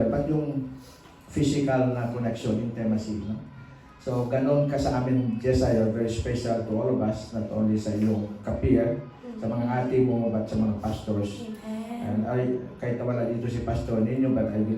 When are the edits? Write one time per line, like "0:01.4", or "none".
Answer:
none